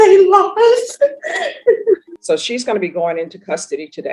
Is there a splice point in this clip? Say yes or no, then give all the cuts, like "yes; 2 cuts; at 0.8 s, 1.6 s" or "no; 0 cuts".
yes; 1 cut; at 2.1 s